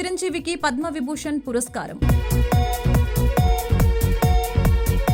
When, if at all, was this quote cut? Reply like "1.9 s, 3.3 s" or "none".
none